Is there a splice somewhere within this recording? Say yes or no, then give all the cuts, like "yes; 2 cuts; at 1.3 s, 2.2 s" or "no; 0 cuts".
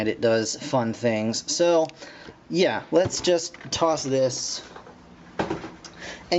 yes; 1 cut; at 5.0 s